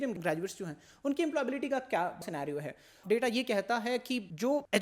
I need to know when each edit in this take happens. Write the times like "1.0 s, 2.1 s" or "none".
2.2 s